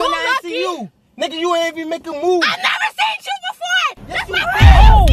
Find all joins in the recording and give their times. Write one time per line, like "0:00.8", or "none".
none

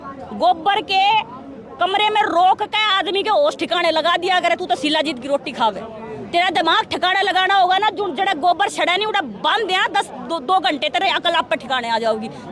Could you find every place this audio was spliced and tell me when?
none

